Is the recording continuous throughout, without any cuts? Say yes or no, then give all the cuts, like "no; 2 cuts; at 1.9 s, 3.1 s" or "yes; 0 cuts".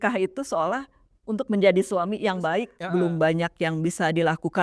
no; 1 cut; at 2.8 s